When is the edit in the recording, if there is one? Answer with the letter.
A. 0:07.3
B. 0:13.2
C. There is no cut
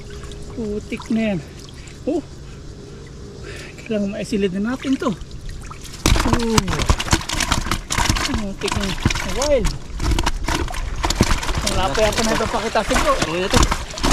B